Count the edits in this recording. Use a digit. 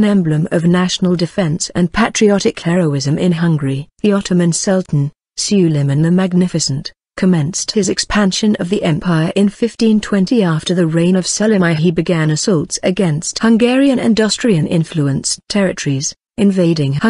1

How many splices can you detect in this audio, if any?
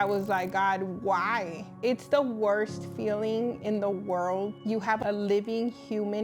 2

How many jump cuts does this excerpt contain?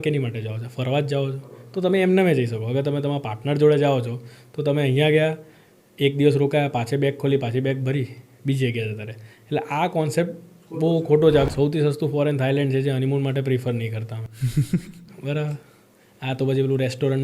1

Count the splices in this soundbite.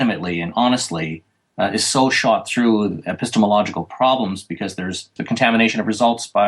1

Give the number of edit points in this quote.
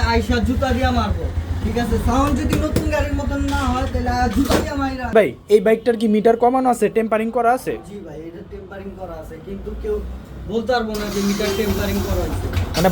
1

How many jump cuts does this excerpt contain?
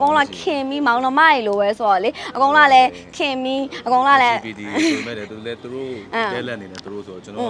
0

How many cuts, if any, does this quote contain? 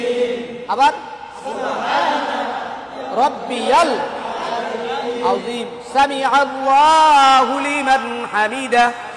0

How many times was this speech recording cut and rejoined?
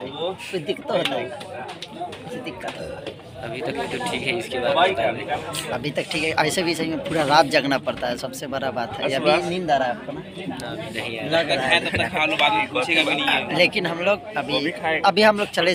0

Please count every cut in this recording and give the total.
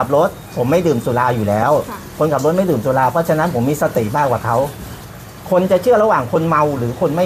0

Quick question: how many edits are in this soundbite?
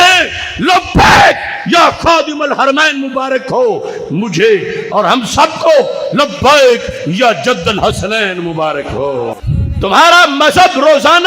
1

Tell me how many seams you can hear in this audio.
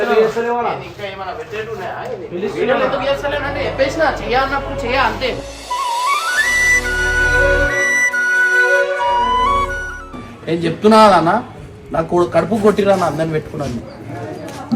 1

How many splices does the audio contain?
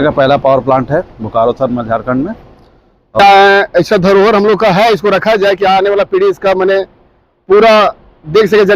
1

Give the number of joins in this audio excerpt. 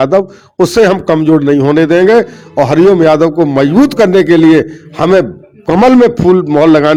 0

